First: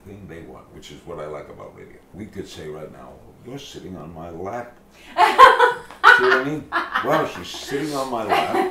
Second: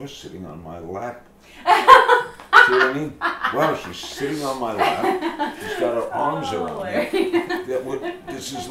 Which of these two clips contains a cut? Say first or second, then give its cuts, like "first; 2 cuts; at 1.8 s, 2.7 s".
first; 1 cut; at 2.0 s